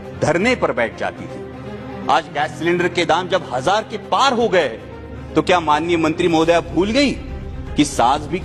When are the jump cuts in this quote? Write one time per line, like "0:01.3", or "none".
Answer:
none